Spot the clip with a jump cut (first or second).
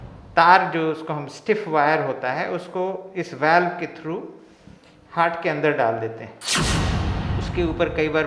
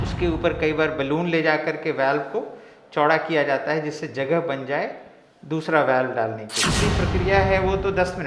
second